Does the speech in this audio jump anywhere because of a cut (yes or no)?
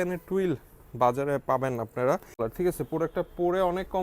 yes